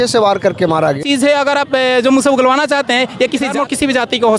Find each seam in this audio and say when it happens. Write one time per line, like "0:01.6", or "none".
0:01.0
0:03.5